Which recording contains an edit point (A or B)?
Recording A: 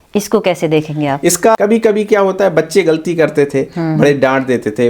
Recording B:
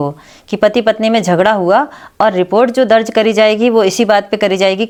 A